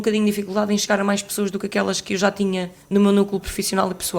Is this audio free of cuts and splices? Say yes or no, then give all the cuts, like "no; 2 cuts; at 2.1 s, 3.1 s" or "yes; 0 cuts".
yes; 0 cuts